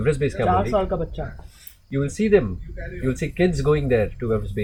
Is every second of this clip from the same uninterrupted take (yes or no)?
yes